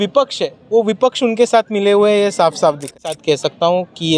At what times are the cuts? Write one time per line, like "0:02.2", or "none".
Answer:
0:03.1